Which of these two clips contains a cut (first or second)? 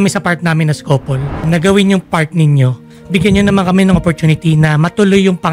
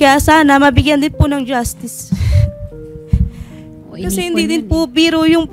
first